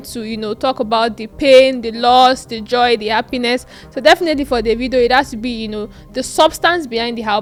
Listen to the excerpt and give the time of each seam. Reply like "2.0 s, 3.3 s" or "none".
none